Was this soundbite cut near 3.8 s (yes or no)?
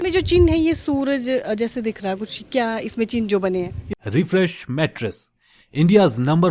yes